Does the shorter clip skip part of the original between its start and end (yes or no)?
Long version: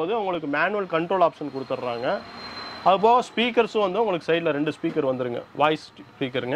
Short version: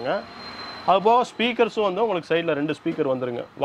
no